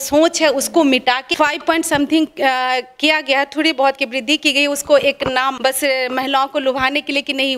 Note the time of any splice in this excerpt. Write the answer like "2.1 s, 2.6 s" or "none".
1.3 s, 5.6 s